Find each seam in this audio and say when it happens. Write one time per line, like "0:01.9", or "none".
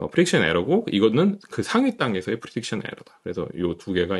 none